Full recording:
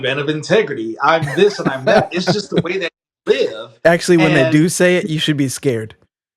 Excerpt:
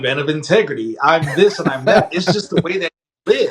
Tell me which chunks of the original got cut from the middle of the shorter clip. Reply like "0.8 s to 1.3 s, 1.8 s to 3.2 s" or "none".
none